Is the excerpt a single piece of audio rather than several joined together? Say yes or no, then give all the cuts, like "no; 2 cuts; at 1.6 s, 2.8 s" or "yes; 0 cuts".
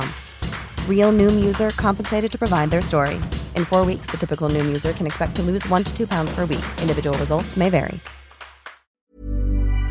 no; 1 cut; at 8.6 s